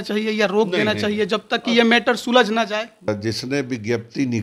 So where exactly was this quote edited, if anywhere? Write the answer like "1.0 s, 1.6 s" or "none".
3.1 s